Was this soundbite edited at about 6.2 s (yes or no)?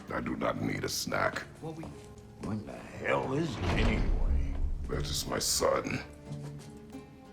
no